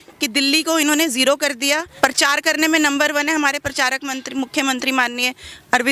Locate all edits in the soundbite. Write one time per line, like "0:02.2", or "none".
0:01.9